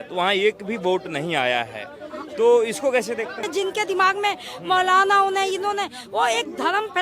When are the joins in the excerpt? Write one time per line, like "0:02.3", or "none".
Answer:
0:03.5